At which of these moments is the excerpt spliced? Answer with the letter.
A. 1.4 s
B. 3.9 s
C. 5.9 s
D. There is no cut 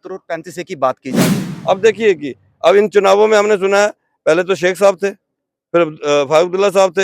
A